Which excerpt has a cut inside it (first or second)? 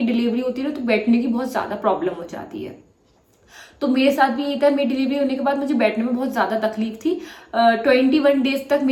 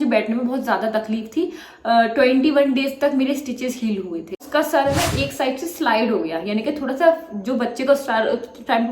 second